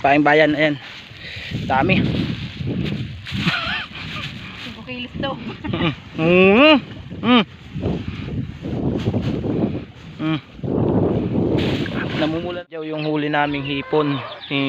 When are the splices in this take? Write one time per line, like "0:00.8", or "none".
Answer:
0:12.6